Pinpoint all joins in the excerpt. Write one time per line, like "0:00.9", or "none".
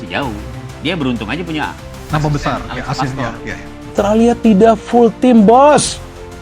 0:03.9